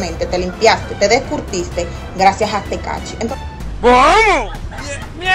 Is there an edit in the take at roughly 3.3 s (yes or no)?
yes